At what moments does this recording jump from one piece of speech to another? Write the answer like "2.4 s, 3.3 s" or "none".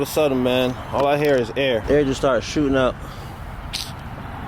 1.8 s